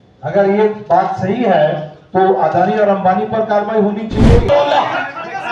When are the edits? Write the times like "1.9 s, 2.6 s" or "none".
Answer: 4.4 s